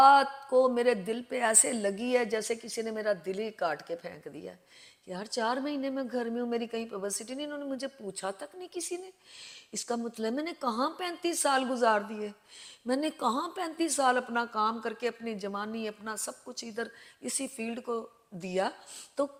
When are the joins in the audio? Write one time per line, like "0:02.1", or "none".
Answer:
none

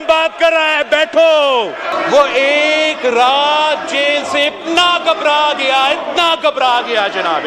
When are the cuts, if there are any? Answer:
0:01.9

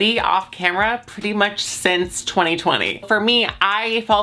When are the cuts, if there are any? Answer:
0:03.0

